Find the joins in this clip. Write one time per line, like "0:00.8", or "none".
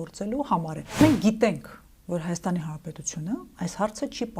0:01.0